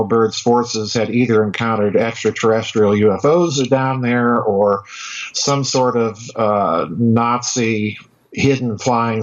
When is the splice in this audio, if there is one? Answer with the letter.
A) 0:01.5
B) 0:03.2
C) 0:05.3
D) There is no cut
B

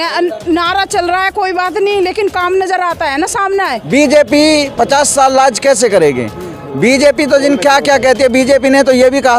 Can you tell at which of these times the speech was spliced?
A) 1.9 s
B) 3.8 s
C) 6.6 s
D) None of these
B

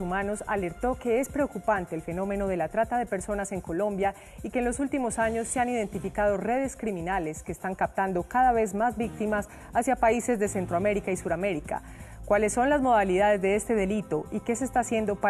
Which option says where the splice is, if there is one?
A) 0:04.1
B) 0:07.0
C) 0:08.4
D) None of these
B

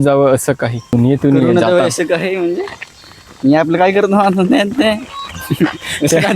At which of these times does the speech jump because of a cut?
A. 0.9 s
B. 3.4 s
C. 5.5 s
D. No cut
A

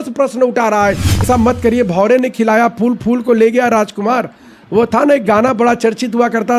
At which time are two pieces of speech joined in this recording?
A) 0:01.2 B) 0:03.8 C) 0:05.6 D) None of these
A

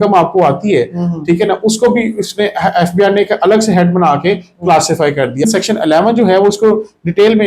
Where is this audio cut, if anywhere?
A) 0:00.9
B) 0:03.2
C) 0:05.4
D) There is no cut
C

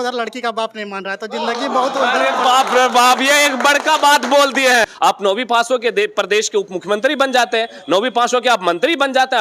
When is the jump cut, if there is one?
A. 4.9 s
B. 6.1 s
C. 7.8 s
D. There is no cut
A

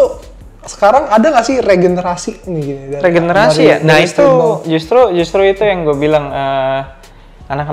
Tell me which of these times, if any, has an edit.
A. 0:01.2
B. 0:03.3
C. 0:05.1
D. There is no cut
D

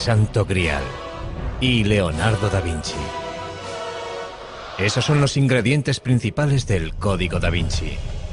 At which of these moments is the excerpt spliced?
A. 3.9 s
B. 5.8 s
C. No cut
C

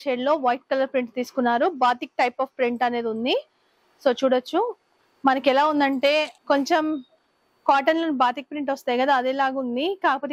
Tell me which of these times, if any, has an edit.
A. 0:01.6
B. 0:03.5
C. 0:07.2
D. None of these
D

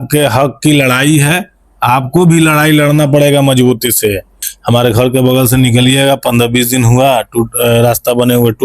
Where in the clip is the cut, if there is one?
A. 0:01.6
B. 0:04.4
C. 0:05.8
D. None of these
B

